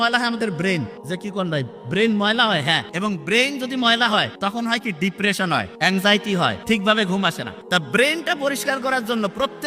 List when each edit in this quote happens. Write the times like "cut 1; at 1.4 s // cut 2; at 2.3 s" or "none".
cut 1; at 1.0 s // cut 2; at 2.9 s // cut 3; at 4.3 s // cut 4; at 5.7 s // cut 5; at 6.6 s // cut 6; at 7.5 s